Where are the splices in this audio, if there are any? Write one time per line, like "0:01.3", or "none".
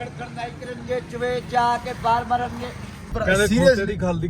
0:03.1

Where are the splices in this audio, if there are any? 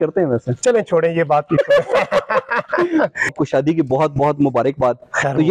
0:03.3

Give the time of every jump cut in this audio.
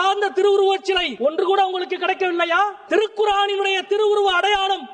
0:01.1
0:02.8

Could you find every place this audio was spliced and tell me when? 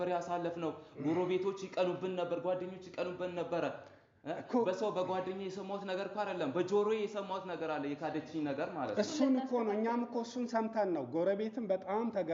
none

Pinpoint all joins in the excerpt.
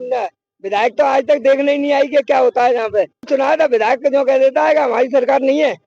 0:03.3

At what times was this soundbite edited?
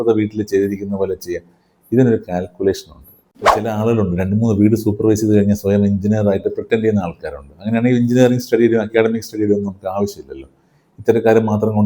0:03.6

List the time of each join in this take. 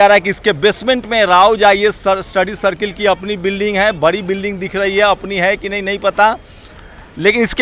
none

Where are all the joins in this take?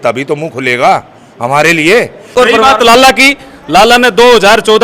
0:02.3

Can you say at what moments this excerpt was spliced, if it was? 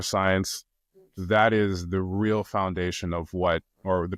none

